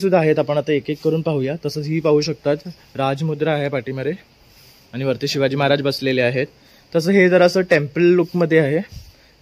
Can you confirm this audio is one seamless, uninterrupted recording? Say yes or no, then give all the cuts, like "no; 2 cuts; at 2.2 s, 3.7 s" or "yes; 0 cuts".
yes; 0 cuts